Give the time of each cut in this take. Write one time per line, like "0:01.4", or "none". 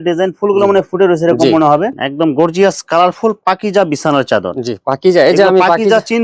0:01.9